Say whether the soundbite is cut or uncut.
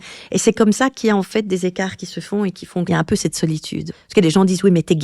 cut